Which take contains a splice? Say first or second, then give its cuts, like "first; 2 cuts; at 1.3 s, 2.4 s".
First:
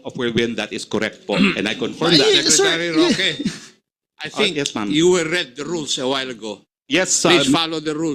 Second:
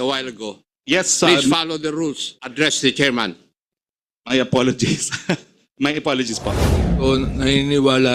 second; 1 cut; at 6.8 s